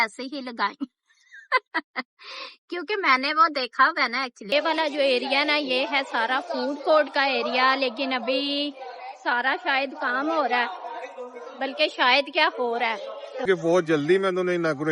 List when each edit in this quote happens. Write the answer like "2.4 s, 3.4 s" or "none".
4.5 s, 13.4 s

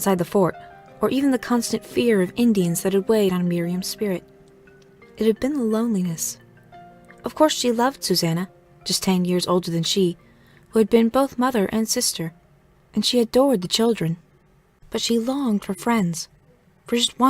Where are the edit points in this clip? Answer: 10.6 s

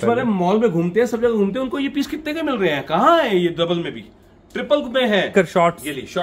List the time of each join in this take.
5.3 s

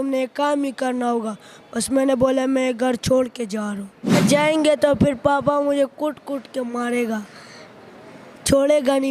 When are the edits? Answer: 4.2 s

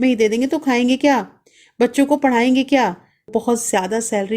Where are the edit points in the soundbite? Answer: 3.3 s

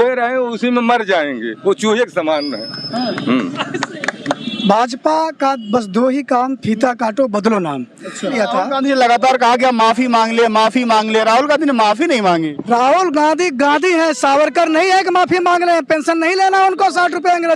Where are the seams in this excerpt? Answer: 4.5 s, 8.3 s

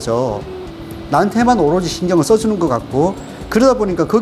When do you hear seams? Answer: none

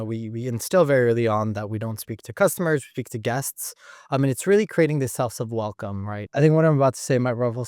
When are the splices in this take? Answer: 6.3 s

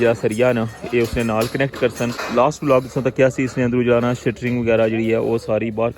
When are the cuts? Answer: 2.2 s

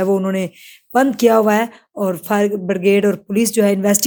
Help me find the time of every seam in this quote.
none

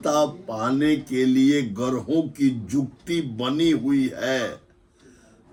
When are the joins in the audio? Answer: none

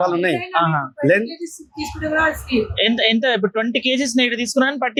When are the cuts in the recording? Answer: none

